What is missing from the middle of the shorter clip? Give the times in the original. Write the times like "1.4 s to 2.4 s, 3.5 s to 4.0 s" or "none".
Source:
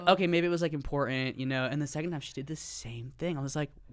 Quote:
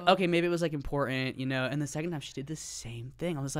none